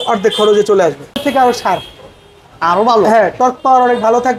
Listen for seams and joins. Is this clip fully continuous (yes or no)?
no